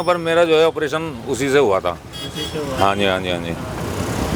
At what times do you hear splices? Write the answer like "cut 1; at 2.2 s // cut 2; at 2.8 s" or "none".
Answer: none

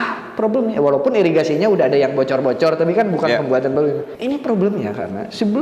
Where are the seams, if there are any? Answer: cut 1; at 4.1 s

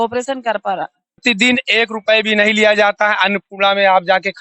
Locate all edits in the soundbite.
cut 1; at 1.2 s

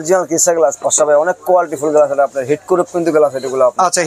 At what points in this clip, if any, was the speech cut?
none

